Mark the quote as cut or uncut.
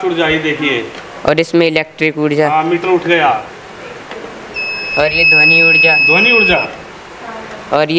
uncut